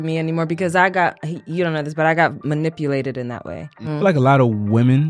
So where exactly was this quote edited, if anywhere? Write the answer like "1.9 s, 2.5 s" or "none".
3.9 s